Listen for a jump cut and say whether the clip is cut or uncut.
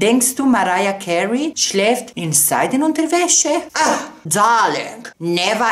cut